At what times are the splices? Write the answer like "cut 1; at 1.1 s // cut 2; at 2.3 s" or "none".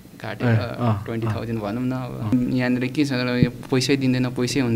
cut 1; at 2.3 s